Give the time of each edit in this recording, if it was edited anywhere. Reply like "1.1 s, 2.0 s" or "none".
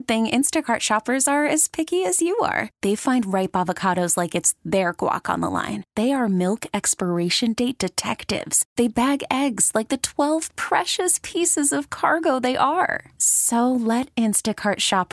none